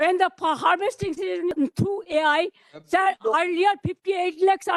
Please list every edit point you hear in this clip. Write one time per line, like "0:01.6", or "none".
0:01.5